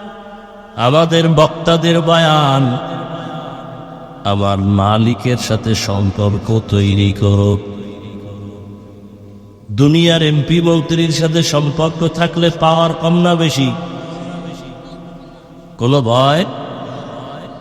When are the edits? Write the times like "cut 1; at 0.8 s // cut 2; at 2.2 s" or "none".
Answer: none

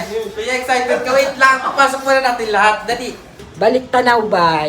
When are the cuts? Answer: cut 1; at 3.4 s

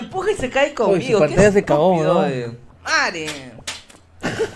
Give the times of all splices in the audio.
cut 1; at 2.7 s

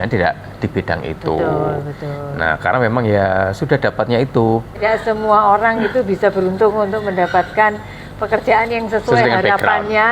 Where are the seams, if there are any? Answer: cut 1; at 4.8 s

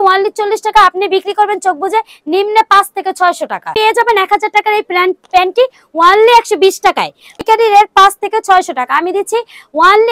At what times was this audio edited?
cut 1; at 3.7 s // cut 2; at 7.4 s

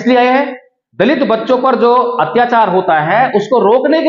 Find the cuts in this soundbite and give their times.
none

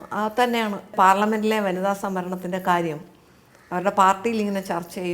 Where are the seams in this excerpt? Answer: cut 1; at 0.9 s

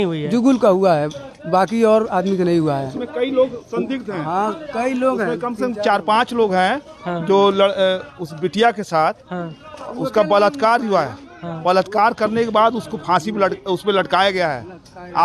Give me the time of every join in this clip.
none

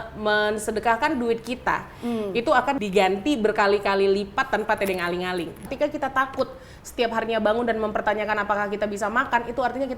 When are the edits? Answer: cut 1; at 2.8 s // cut 2; at 5.6 s

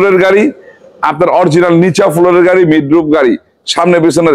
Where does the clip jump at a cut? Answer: none

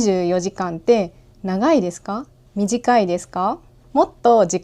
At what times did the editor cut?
cut 1; at 2.4 s // cut 2; at 3.7 s

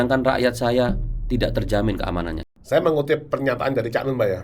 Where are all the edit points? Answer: cut 1; at 2.4 s

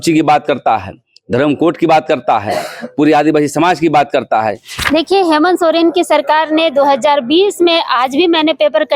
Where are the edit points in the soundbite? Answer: cut 1; at 4.7 s

